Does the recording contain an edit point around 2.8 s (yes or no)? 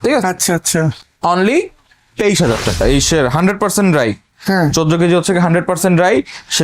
yes